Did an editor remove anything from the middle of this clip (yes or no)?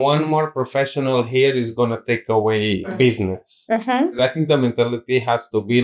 yes